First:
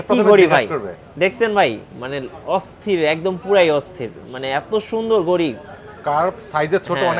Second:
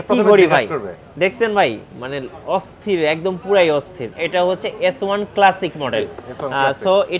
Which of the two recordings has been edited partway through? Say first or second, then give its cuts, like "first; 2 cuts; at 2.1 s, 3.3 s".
second; 1 cut; at 4.1 s